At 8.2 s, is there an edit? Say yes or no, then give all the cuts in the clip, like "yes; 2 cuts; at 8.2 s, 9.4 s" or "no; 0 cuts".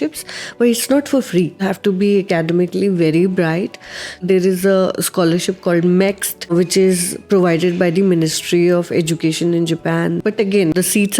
no; 4 cuts; at 1.6 s, 4.2 s, 6.5 s, 10.4 s